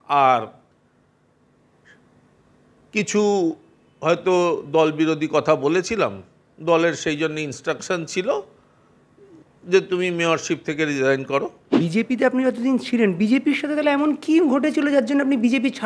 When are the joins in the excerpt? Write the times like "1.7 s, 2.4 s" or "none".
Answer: 11.8 s